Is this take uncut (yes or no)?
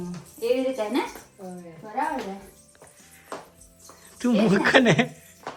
yes